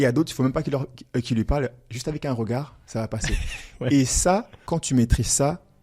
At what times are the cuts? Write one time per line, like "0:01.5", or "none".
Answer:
0:04.6